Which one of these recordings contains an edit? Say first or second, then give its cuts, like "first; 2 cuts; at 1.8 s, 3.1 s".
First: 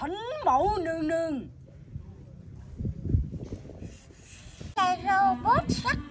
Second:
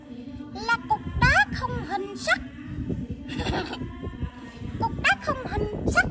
first; 1 cut; at 4.7 s